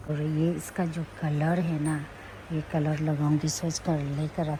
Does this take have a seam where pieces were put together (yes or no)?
no